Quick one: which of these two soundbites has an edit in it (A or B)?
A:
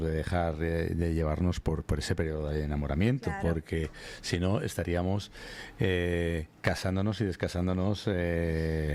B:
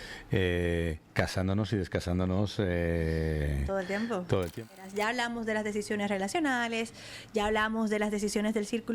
B